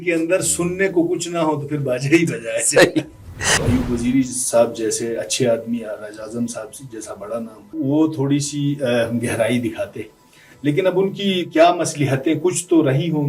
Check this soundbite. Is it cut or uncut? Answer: cut